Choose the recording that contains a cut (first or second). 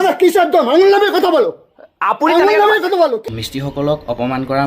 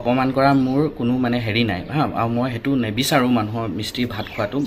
first